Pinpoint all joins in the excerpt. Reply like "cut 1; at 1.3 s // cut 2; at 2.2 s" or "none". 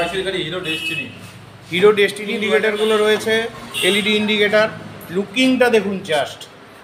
cut 1; at 2.3 s